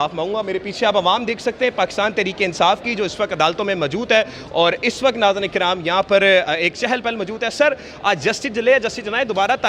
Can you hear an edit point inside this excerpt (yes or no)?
no